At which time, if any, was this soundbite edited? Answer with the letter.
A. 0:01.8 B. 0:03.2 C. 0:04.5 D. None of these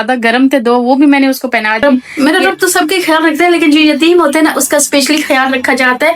A